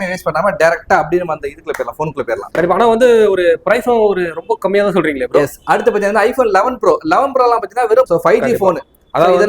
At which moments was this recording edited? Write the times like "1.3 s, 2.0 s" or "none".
2.4 s, 8.1 s